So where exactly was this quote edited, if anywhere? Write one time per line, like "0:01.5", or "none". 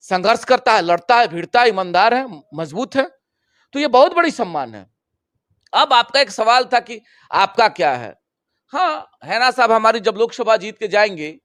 none